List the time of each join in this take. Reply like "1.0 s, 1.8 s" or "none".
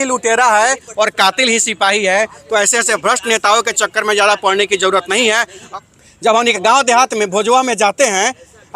5.6 s